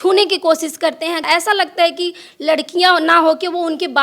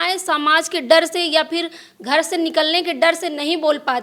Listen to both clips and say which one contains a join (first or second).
first